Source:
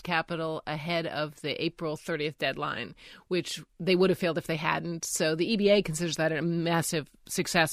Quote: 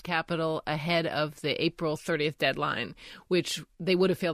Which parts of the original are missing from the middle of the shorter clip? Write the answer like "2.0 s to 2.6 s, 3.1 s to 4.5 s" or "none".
none